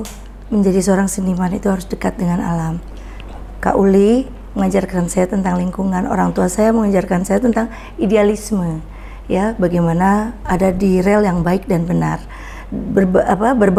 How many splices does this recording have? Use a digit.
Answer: 0